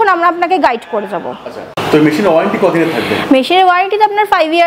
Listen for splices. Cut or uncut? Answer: uncut